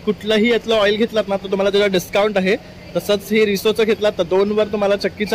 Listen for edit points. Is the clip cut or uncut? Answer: uncut